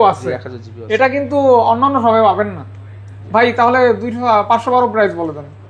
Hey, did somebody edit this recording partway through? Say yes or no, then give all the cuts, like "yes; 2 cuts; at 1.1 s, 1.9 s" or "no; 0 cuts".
no; 0 cuts